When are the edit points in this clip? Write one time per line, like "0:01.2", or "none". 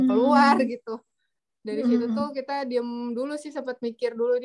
none

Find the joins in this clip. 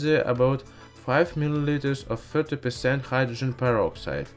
0:03.0

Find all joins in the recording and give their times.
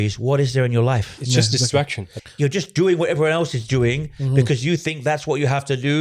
0:02.0

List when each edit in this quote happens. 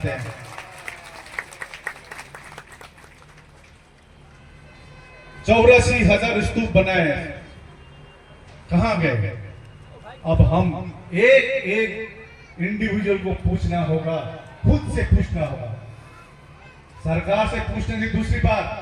none

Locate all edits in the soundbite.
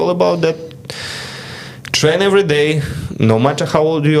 none

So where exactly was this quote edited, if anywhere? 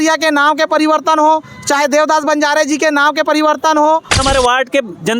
0:04.2

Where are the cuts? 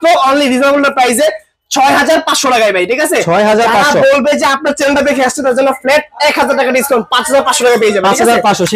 none

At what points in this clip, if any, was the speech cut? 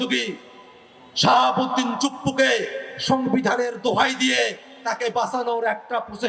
none

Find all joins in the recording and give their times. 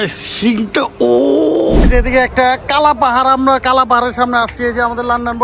0:01.8

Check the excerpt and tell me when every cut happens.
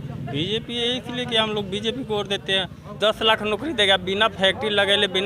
0:02.8

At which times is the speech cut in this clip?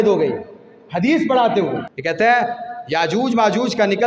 0:01.9

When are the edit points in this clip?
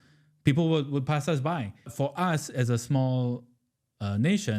0:01.9

